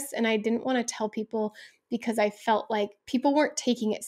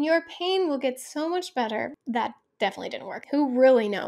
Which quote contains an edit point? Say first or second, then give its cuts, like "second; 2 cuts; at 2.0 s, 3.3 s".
second; 2 cuts; at 2.0 s, 3.2 s